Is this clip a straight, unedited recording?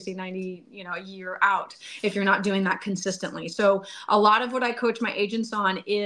yes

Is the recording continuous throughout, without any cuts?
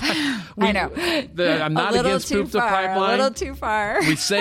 yes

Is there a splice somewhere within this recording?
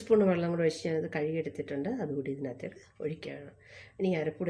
no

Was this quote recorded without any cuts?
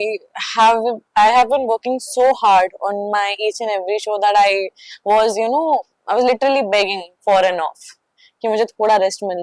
yes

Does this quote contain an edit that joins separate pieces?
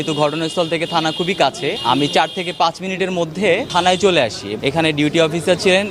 yes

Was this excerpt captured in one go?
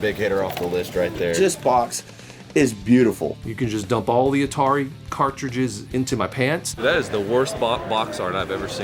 no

